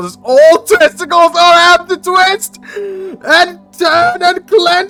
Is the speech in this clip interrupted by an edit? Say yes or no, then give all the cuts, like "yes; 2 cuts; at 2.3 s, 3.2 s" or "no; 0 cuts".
no; 0 cuts